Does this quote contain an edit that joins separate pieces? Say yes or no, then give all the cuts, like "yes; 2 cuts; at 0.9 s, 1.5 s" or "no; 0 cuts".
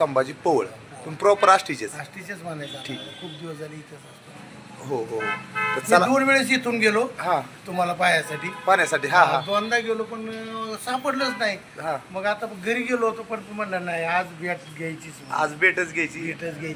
no; 0 cuts